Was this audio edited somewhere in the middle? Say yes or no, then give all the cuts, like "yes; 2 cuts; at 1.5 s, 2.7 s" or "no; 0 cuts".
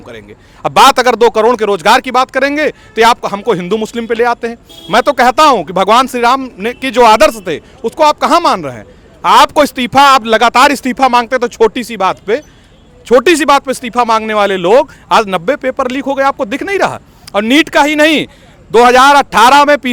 no; 0 cuts